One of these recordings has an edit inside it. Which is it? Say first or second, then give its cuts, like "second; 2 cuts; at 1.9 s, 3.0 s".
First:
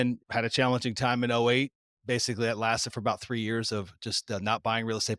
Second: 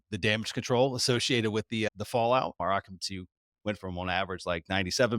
second; 1 cut; at 2.6 s